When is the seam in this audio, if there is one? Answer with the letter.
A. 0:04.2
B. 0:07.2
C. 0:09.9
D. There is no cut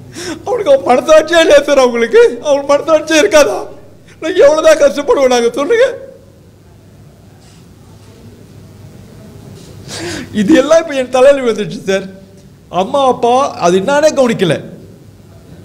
D